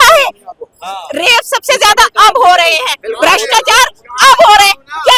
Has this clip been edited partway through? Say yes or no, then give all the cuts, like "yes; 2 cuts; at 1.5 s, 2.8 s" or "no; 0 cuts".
no; 0 cuts